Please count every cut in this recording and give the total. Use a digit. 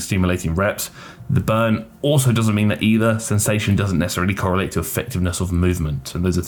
0